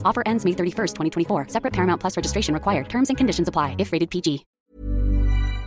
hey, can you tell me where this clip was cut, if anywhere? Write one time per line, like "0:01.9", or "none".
0:04.5